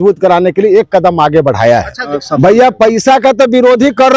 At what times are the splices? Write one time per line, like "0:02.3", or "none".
0:02.0